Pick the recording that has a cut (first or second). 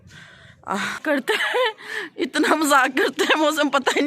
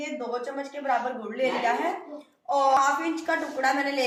first